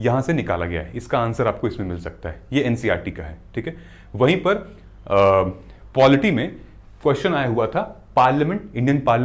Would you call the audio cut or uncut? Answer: uncut